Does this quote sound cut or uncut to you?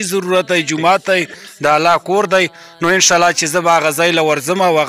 uncut